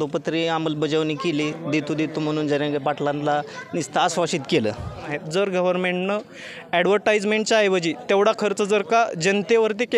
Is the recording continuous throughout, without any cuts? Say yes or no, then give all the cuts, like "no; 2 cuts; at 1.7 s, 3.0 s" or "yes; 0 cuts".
no; 1 cut; at 5.0 s